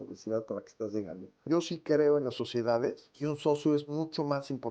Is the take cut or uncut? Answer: cut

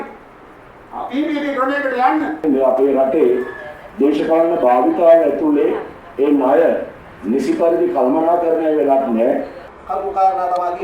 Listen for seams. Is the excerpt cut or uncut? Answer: cut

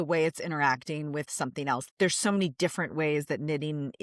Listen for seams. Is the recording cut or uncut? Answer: cut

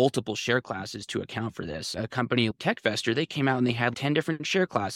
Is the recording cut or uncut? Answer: cut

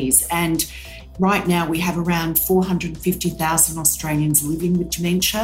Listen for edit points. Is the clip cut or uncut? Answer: cut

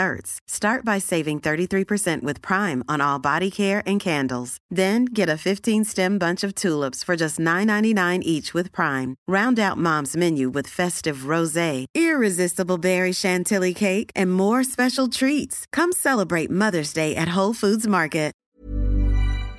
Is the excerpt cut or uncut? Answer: cut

